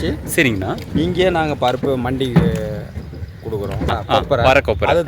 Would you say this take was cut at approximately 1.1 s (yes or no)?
no